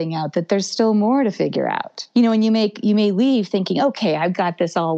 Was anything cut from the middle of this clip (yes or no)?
yes